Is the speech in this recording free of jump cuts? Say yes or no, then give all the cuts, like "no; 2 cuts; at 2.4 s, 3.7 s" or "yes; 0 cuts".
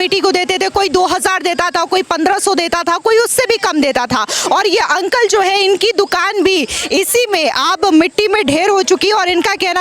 yes; 0 cuts